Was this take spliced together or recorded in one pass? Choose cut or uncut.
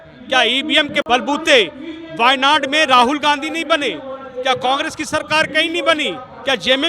cut